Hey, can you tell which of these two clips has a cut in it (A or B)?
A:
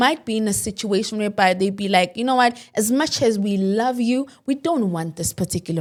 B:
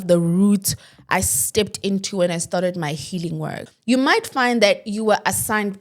B